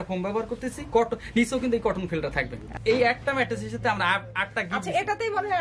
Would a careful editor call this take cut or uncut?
cut